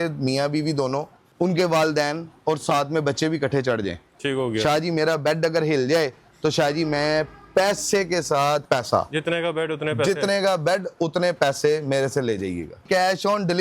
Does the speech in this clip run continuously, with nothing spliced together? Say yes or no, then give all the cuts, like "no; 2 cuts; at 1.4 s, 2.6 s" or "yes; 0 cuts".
no; 3 cuts; at 1.2 s, 8.6 s, 12.8 s